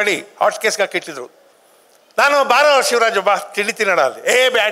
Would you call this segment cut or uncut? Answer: uncut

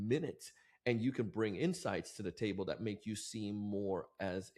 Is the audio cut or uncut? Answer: uncut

